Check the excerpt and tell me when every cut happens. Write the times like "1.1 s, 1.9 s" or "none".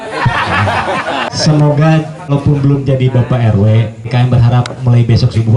1.3 s, 2.3 s, 4.1 s